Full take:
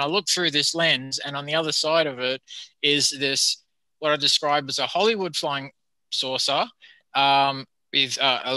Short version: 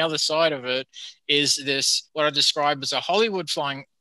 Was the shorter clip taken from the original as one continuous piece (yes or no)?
no